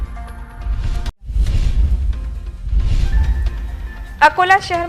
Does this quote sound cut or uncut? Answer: cut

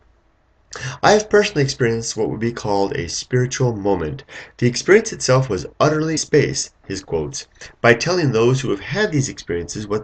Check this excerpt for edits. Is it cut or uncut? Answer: uncut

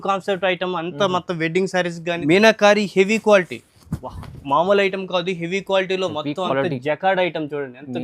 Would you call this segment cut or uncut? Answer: cut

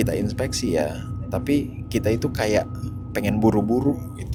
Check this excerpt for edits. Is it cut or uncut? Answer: uncut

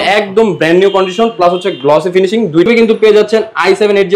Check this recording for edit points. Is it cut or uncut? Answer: cut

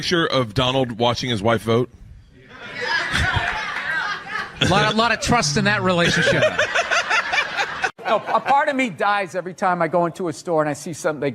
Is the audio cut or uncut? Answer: cut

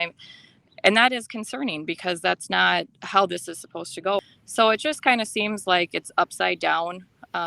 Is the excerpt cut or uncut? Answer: cut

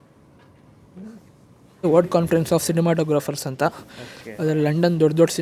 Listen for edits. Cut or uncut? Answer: cut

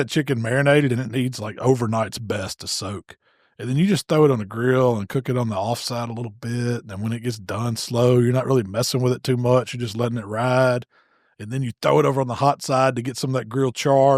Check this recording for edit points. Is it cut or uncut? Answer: uncut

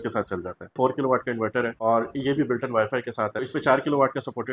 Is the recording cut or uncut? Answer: cut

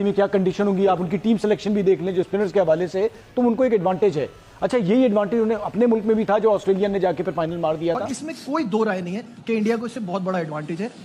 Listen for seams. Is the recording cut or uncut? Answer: cut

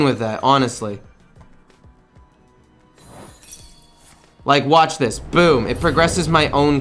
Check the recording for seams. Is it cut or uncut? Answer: uncut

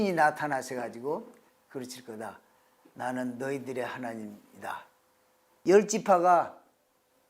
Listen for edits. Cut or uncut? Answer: cut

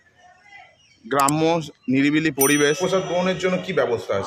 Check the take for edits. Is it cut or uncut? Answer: cut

